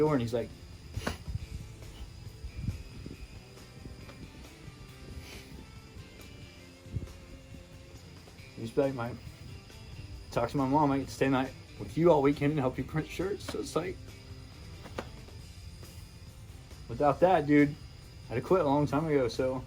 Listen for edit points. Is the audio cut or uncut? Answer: uncut